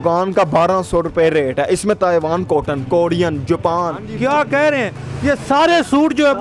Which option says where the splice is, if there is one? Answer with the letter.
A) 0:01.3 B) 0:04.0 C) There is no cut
B